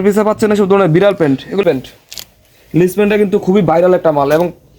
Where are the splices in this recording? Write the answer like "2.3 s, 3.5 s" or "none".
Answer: 1.6 s